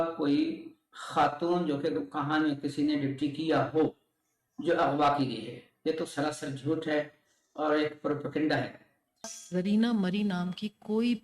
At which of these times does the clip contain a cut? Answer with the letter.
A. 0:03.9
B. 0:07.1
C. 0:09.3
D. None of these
C